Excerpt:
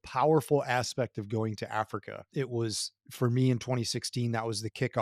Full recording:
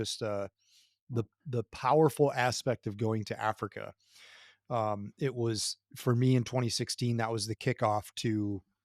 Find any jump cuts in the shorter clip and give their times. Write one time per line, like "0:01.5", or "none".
0:02.2